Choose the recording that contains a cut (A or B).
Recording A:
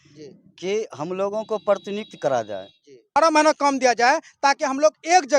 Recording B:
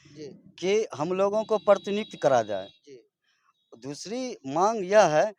A